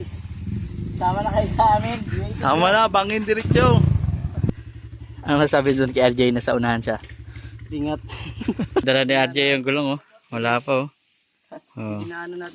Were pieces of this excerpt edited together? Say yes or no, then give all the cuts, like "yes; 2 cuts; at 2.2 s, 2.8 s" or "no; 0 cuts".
yes; 2 cuts; at 4.5 s, 8.8 s